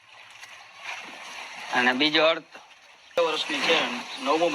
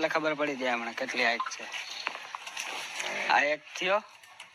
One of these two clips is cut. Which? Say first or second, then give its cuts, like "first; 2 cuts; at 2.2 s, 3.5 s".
first; 1 cut; at 3.2 s